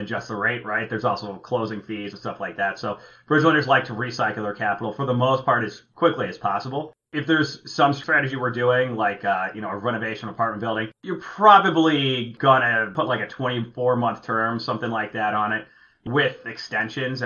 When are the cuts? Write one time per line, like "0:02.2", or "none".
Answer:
none